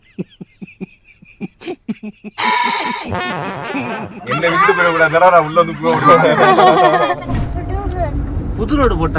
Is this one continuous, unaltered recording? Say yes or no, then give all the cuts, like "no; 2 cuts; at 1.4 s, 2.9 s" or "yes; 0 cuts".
no; 1 cut; at 7.4 s